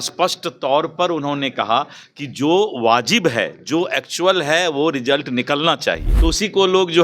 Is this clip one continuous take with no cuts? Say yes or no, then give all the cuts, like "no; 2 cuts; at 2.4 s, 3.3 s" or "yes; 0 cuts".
no; 1 cut; at 6.1 s